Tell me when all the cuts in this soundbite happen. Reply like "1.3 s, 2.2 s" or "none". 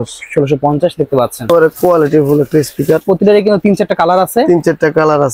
1.4 s